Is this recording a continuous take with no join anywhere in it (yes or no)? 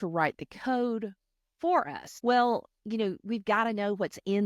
no